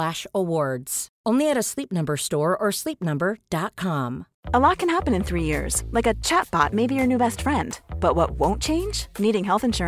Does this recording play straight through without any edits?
yes; 0 cuts

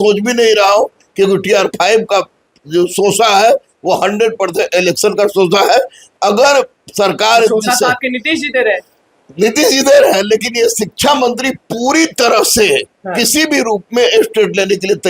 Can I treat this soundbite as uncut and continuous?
yes; 0 cuts

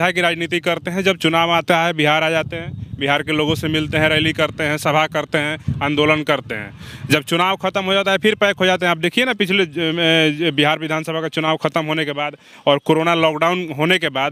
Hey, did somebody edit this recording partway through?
no; 0 cuts

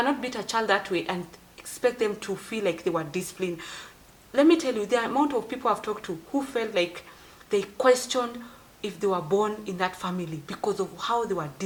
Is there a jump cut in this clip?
no; 0 cuts

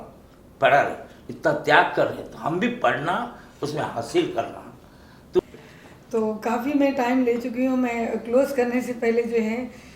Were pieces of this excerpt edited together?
yes; 1 cut; at 5.4 s

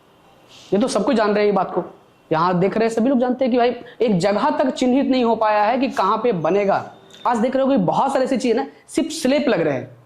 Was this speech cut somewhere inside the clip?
yes; 1 cut; at 7.2 s

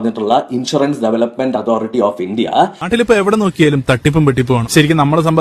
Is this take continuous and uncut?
no; 1 cut; at 2.8 s

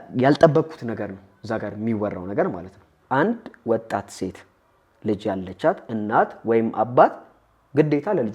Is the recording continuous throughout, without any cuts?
no; 1 cut; at 2.9 s

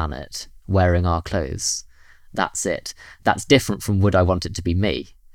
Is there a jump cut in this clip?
yes; 1 cut; at 3.1 s

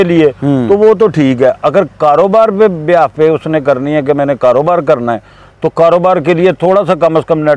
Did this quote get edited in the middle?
no; 0 cuts

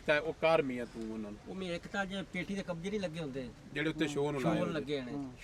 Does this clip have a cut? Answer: no; 0 cuts

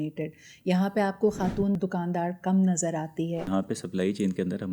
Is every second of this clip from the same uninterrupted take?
no; 2 cuts; at 1.8 s, 3.5 s

